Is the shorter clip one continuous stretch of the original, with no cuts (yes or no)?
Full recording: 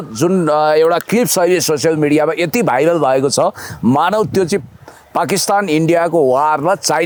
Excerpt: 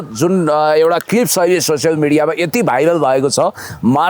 yes